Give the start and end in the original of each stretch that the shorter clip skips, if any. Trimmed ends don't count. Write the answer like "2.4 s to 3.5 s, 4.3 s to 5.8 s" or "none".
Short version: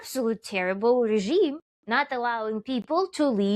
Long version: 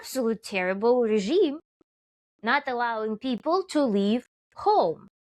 1.7 s to 2.3 s